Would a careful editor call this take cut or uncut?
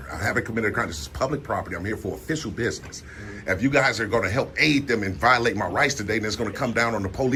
uncut